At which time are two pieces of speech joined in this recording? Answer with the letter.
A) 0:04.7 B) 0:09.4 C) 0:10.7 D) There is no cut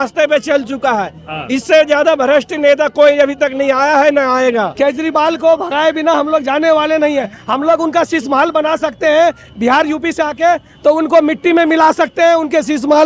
A